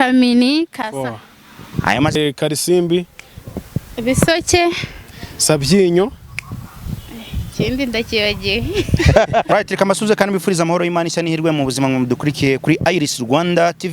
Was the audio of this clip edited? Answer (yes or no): yes